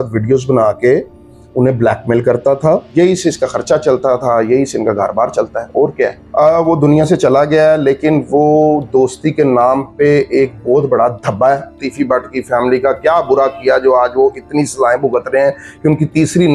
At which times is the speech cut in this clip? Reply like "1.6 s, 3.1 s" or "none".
2.9 s, 6.2 s, 11.9 s